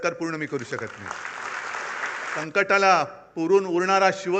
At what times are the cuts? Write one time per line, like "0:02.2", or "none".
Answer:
0:02.4